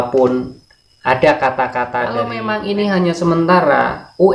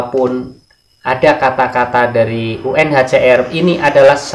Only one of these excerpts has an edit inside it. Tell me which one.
first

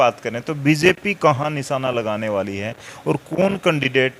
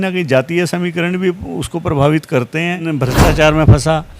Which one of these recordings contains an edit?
second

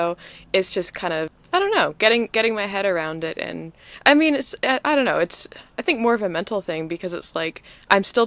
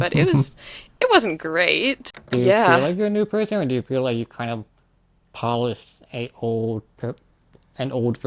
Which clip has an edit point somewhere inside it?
second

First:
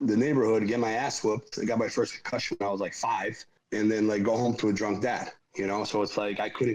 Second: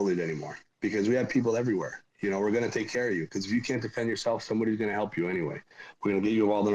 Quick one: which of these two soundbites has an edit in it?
first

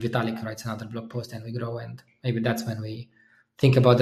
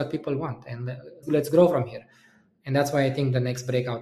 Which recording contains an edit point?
second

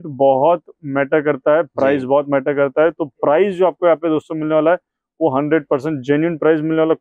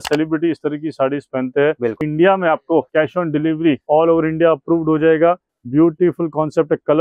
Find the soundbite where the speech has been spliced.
second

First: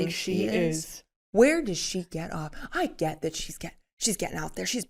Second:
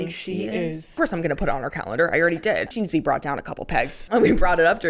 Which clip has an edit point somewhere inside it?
second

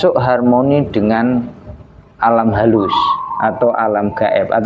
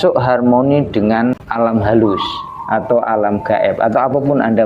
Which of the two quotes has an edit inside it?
second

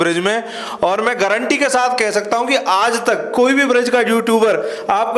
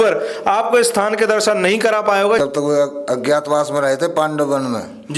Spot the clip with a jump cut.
second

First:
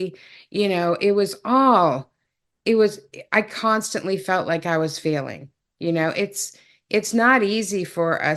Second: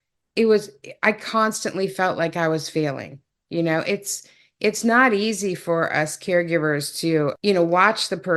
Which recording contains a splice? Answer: second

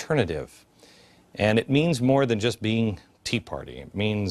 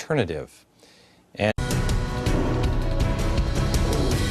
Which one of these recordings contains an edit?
first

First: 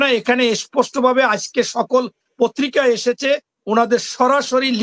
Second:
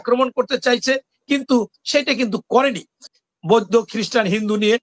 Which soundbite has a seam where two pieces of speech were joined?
second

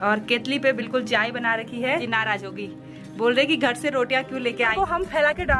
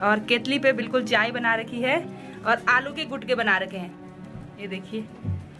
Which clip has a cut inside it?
first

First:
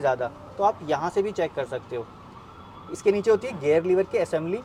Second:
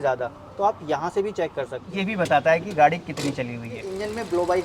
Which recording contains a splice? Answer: second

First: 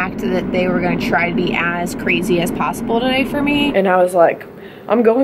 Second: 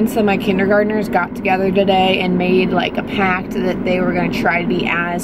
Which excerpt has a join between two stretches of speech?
first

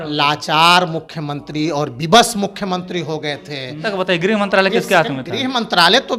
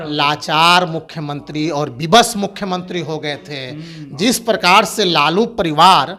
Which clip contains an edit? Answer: first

